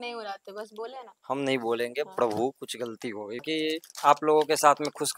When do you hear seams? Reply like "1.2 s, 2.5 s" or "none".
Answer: 3.4 s

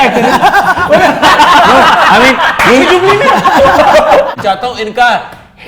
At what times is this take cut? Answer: 4.3 s

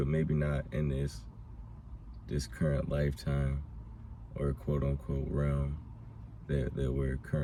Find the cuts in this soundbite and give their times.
none

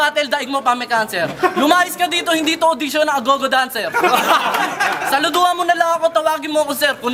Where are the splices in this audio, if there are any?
none

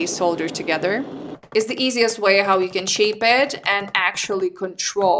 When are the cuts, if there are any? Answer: 1.2 s

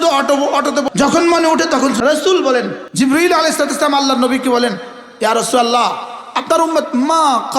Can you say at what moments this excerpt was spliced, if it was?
0.9 s, 2.0 s, 2.8 s

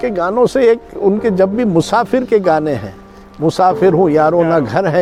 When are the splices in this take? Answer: none

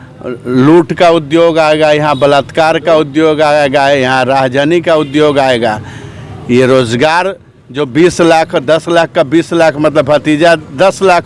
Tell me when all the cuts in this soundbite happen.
none

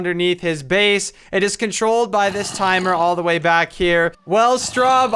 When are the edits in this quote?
4.2 s

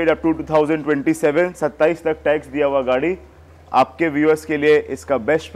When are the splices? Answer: none

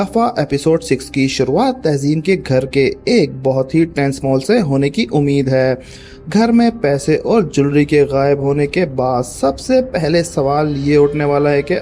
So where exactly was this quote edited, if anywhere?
none

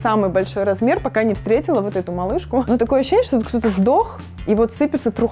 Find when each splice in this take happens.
2.7 s

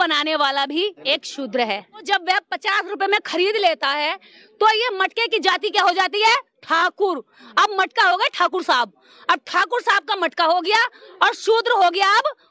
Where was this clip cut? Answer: 1.0 s, 2.0 s

